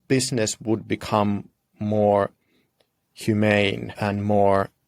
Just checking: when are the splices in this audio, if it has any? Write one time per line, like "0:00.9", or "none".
0:03.9